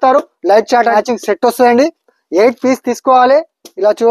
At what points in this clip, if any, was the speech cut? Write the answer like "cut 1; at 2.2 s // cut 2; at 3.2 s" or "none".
cut 1; at 0.9 s